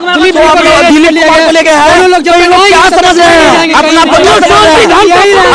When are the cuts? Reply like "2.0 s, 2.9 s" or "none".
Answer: none